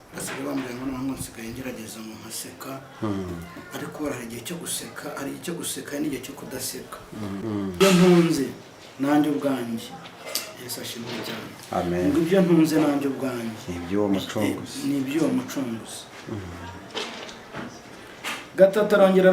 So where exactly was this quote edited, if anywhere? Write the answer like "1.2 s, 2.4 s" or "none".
7.7 s